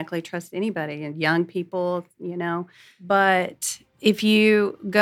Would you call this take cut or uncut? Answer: cut